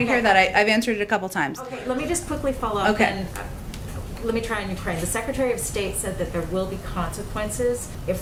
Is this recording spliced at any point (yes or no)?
no